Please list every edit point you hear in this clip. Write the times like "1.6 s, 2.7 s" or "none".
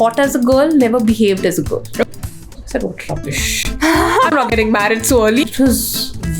2.1 s, 5.4 s

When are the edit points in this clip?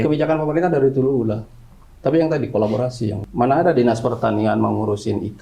3.2 s

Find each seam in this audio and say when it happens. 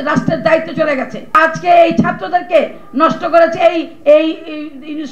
1.4 s

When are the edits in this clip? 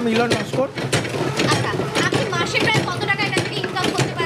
1.5 s

